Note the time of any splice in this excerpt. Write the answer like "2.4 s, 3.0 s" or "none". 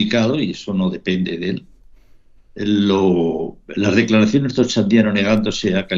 none